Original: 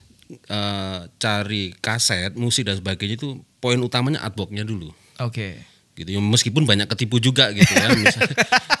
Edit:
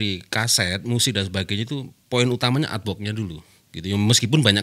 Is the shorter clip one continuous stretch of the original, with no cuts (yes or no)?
no